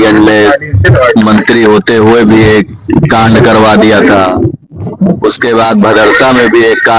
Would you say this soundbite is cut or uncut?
uncut